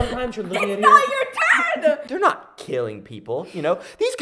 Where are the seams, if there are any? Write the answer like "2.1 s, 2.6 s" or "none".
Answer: 2.1 s